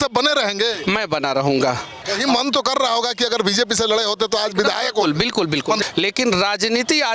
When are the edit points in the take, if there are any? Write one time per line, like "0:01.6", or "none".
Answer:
0:02.1
0:05.8